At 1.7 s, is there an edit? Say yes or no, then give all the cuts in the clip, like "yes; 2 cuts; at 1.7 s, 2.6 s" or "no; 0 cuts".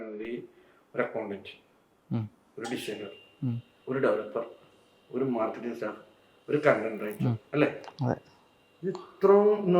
no; 1 cut; at 3.7 s